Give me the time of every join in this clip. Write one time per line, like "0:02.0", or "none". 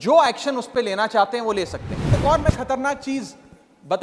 0:02.1